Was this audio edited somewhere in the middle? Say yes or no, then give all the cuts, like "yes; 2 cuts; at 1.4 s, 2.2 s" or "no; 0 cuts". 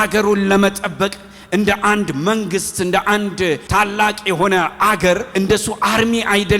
yes; 2 cuts; at 3.6 s, 5.3 s